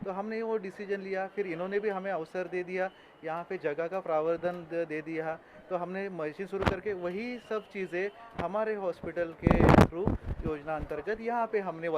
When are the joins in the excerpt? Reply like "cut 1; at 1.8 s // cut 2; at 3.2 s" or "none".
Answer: none